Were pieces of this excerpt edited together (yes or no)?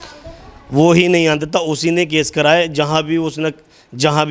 no